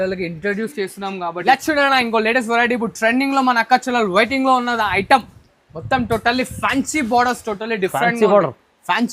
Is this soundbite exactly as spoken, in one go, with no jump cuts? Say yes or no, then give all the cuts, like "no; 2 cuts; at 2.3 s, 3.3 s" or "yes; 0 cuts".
no; 1 cut; at 1.4 s